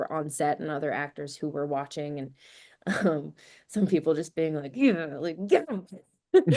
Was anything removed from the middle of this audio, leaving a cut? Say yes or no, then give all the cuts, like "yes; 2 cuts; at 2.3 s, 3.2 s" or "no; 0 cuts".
no; 0 cuts